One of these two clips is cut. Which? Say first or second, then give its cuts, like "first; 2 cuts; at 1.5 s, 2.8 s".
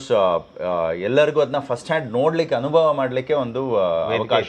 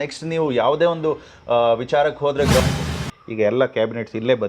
second; 1 cut; at 2.6 s